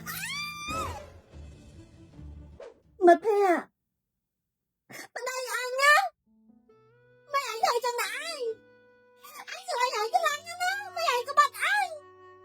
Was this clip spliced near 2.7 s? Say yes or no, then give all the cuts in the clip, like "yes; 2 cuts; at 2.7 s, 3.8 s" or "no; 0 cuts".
yes; 1 cut; at 2.7 s